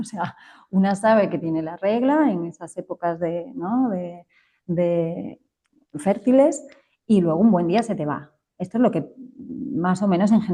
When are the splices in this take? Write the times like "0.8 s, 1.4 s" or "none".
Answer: none